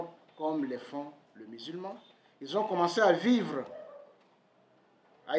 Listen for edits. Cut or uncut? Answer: uncut